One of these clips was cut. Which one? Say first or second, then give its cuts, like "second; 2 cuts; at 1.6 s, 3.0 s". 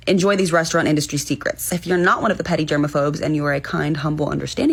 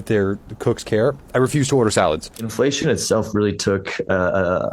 second; 1 cut; at 2.3 s